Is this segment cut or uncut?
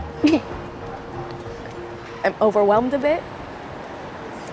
uncut